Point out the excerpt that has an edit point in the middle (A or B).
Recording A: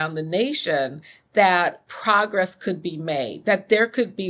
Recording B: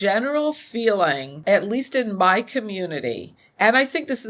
B